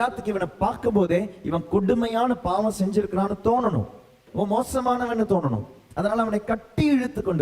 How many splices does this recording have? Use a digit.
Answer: 1